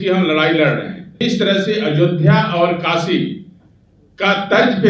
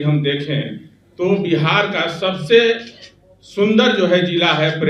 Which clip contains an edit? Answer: first; 1 cut; at 1.0 s

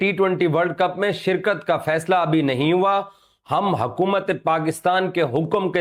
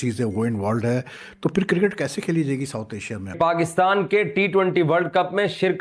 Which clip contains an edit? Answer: second; 1 cut; at 3.2 s

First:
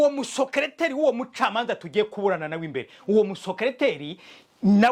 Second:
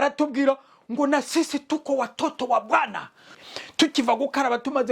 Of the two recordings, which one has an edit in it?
second; 1 cut; at 3.3 s

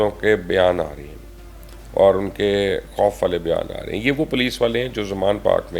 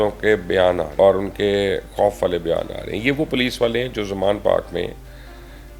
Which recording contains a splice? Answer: second; 1 cut; at 0.9 s

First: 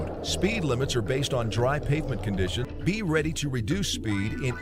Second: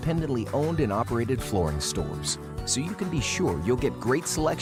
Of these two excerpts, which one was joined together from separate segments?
first; 1 cut; at 2.6 s

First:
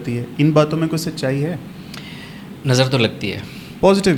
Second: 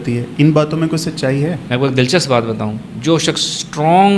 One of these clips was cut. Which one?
second; 1 cut; at 1.6 s

